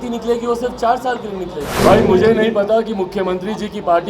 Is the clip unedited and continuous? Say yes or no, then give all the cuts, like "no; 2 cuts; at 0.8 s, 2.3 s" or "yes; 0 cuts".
no; 1 cut; at 1.8 s